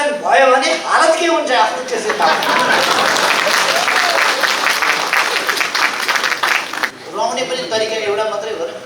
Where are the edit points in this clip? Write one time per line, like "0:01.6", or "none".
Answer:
0:07.0